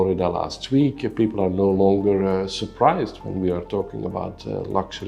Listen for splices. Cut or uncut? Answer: uncut